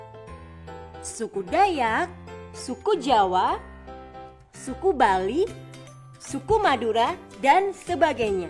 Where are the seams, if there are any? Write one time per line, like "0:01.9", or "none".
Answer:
0:01.2